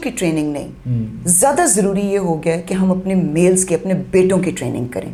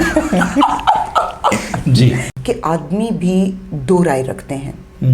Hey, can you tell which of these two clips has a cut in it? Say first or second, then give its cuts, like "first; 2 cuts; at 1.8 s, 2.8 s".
second; 1 cut; at 2.3 s